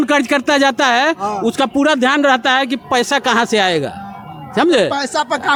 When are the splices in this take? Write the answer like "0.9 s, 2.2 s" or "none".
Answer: none